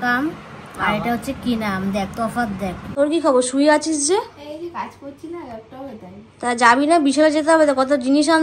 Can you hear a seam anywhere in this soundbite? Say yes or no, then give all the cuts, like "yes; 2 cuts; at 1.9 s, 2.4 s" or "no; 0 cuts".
yes; 1 cut; at 2.8 s